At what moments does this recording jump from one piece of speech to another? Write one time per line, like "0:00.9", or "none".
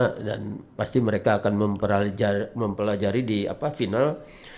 none